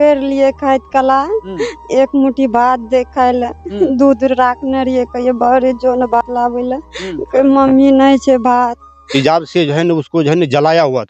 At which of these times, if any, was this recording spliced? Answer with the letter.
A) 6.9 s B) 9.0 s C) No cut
B